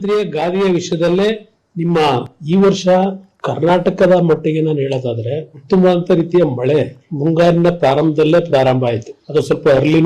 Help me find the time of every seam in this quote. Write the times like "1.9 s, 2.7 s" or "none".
2.3 s